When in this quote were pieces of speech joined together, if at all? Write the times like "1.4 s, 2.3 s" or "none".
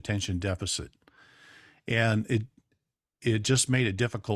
none